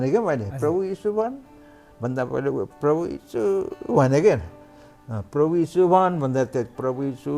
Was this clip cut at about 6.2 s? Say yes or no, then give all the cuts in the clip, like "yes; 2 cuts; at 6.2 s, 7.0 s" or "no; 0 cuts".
no; 0 cuts